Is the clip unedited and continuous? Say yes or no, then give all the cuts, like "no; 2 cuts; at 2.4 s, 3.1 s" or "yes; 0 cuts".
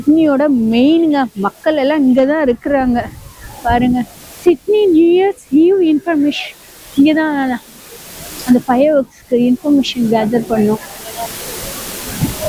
yes; 0 cuts